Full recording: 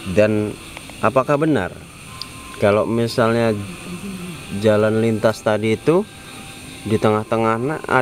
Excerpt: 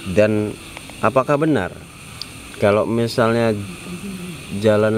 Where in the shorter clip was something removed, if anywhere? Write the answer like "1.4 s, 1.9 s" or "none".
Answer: none